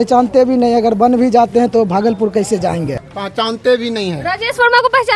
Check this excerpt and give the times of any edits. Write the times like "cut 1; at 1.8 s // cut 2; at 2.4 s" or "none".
cut 1; at 3.1 s